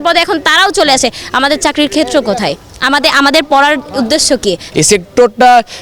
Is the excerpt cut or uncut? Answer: cut